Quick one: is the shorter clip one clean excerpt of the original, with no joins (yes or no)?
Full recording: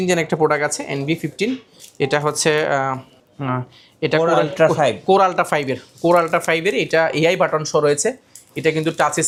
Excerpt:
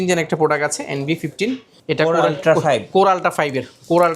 no